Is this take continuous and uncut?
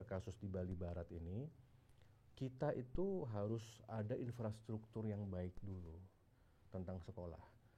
yes; 0 cuts

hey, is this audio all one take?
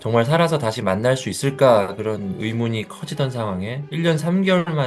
yes; 0 cuts

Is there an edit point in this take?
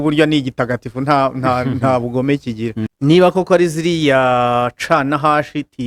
yes; 1 cut; at 2.9 s

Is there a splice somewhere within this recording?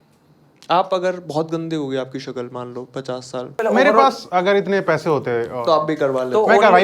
yes; 1 cut; at 3.6 s

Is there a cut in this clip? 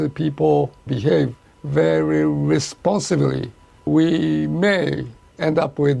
no; 0 cuts

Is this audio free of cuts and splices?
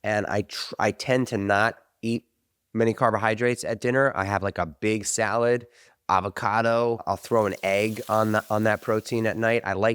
no; 1 cut; at 7.0 s

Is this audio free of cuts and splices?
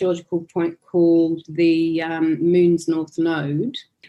yes; 0 cuts

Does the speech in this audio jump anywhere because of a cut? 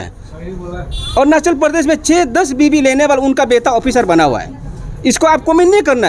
no; 0 cuts

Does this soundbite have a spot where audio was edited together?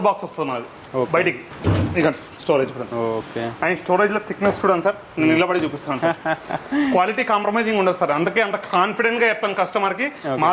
yes; 1 cut; at 1.5 s

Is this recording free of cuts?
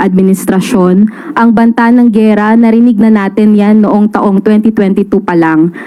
yes; 0 cuts

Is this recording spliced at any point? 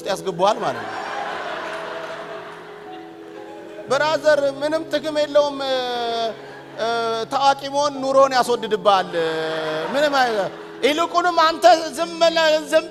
no; 0 cuts

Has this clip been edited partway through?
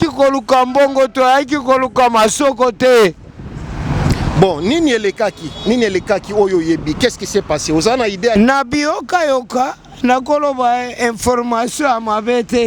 yes; 1 cut; at 8.3 s

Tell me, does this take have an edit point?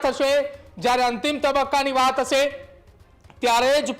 no; 0 cuts

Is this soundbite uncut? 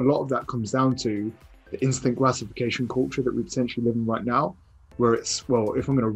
yes; 0 cuts

